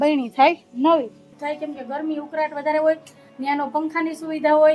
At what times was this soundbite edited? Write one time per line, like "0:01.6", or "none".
0:01.3